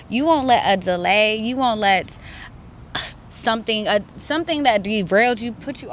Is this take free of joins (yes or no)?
yes